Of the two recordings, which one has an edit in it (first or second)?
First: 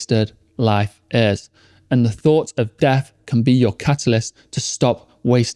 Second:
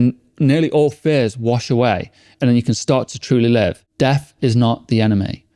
second